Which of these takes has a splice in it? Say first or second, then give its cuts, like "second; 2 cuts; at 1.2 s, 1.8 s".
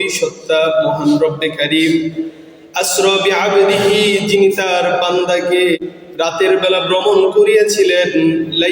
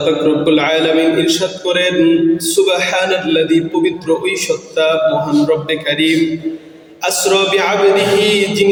first; 1 cut; at 5.8 s